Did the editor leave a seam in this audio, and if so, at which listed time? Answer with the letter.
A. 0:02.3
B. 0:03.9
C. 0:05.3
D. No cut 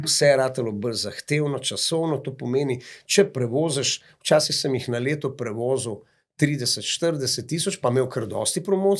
D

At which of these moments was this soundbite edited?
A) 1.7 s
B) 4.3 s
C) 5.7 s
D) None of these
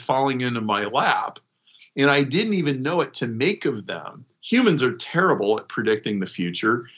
B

